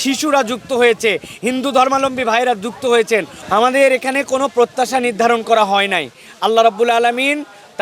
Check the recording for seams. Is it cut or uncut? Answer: cut